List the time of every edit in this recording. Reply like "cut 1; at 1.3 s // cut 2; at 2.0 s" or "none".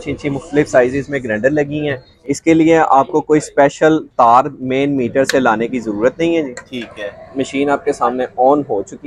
cut 1; at 2.1 s